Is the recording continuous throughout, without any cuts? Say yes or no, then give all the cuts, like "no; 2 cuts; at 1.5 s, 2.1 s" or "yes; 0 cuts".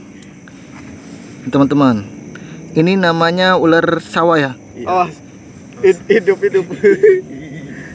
yes; 0 cuts